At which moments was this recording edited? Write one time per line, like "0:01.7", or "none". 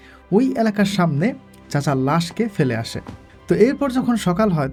none